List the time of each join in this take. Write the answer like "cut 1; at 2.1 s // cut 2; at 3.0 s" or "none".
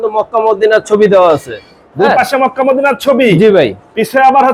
none